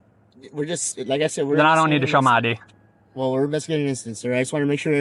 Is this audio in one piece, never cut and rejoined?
yes; 0 cuts

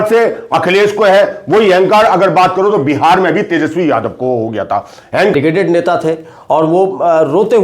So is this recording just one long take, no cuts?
no; 1 cut; at 5.3 s

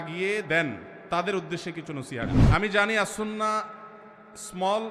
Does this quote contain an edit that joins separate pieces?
yes; 1 cut; at 2.4 s

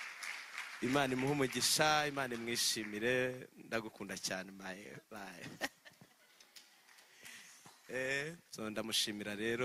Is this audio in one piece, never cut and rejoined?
no; 1 cut; at 8.4 s

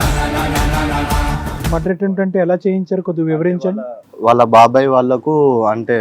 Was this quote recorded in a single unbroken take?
no; 1 cut; at 1.6 s

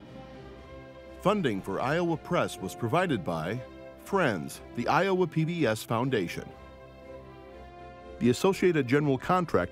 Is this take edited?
yes; 1 cut; at 1.2 s

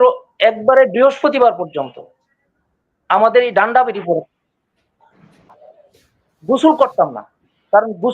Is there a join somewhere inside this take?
yes; 1 cut; at 5.4 s

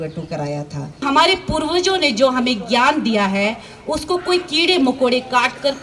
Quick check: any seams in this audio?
yes; 1 cut; at 1.0 s

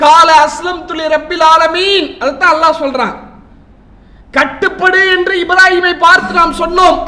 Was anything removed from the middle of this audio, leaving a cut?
no; 0 cuts

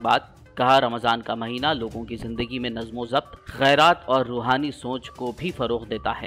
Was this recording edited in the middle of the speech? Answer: no; 0 cuts

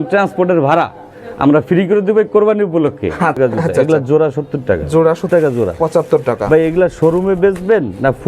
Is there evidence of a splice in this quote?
yes; 2 cuts; at 3.4 s, 5.3 s

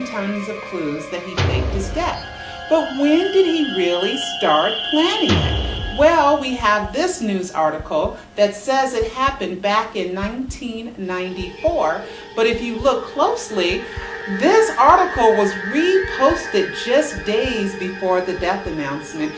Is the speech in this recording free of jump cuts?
yes; 0 cuts

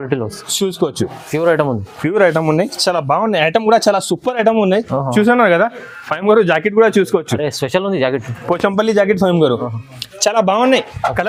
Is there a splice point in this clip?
no; 0 cuts

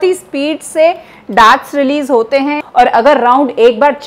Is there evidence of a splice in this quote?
yes; 1 cut; at 2.6 s

